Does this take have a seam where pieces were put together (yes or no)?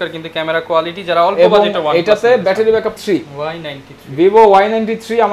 yes